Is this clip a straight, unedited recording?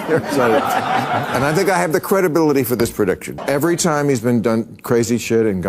no; 1 cut; at 3.3 s

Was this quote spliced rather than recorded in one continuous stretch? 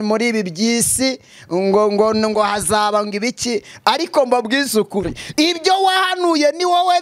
no; 0 cuts

